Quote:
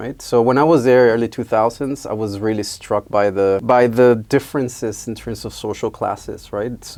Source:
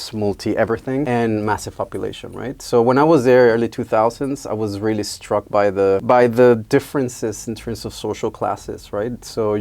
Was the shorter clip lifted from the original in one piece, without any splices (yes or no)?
yes